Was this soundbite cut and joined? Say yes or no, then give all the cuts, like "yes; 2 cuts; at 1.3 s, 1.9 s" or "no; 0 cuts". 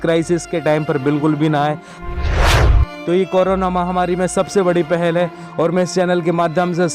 yes; 2 cuts; at 1.9 s, 3.0 s